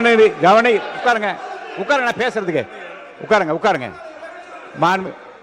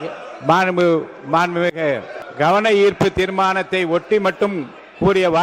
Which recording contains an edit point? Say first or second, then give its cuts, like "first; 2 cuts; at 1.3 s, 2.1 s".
second; 1 cut; at 2.2 s